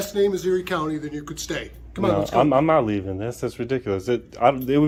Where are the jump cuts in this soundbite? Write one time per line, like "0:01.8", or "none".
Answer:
none

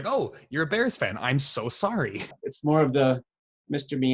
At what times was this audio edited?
0:02.3

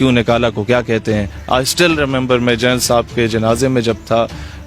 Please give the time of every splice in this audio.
0:01.3

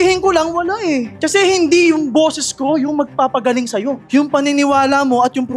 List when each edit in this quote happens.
0:01.1

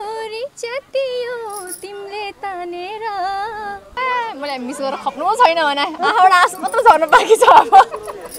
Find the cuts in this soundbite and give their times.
0:04.0

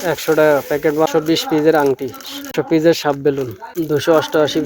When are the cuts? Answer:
0:01.1
0:02.5
0:03.6

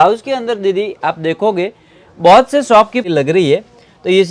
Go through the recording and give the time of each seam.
0:03.0

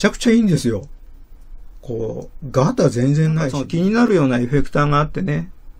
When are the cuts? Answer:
0:03.6

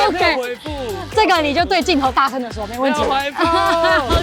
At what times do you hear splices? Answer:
none

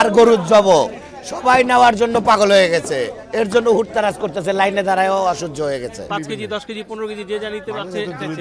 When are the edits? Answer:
0:06.0

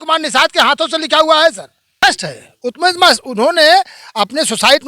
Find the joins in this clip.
0:02.0

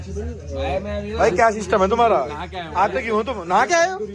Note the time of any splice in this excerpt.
none

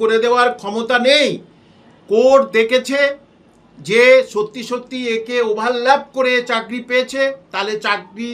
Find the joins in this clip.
none

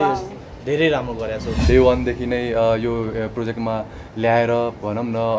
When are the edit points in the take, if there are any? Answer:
0:01.5

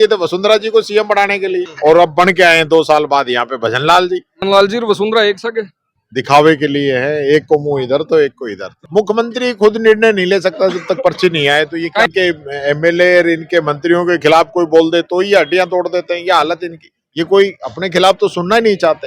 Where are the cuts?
0:01.7
0:04.3
0:08.7
0:12.0

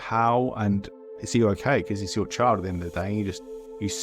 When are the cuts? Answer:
0:01.0

